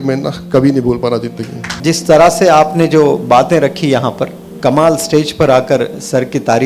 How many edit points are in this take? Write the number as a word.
two